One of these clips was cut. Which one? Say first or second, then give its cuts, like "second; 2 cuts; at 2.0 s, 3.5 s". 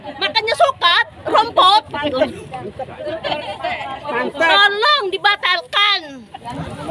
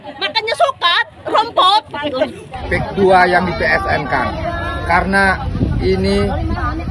second; 1 cut; at 2.5 s